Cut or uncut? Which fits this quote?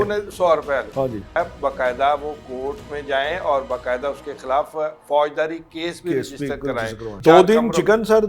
cut